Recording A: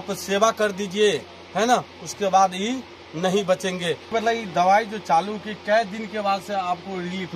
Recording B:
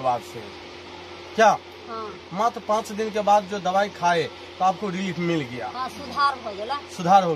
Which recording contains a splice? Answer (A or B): A